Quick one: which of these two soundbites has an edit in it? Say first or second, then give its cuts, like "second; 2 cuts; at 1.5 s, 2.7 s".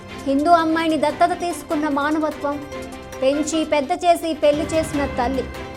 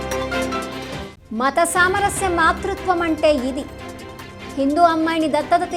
second; 1 cut; at 1.0 s